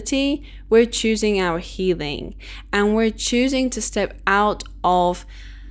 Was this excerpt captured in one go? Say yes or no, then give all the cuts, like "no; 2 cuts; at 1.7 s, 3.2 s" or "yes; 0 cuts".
yes; 0 cuts